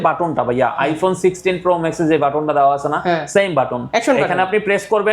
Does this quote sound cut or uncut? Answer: uncut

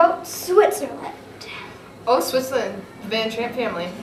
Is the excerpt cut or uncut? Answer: uncut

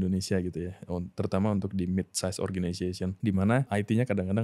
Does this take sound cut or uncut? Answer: cut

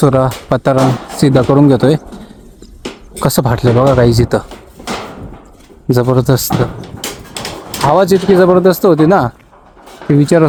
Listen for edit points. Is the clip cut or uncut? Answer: uncut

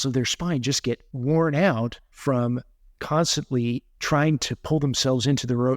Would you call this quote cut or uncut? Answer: cut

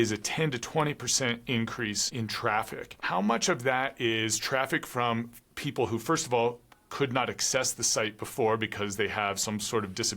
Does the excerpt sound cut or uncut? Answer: cut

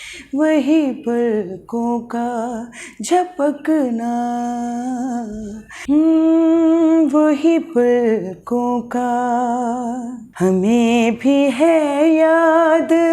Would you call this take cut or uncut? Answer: cut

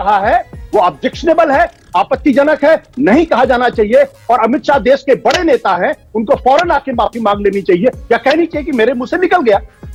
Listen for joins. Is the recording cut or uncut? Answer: uncut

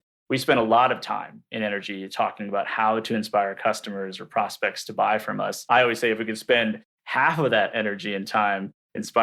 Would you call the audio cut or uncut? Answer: uncut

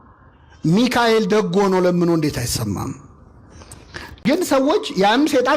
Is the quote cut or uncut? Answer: cut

